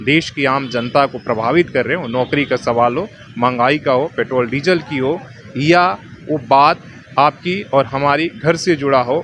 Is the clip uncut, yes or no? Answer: yes